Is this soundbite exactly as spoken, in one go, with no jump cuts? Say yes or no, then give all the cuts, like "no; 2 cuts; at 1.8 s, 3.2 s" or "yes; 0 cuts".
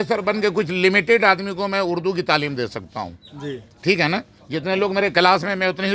yes; 0 cuts